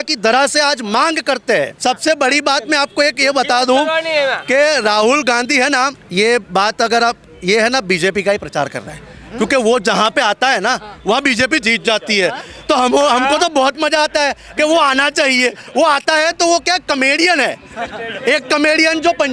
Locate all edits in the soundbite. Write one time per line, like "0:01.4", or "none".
0:01.7
0:06.0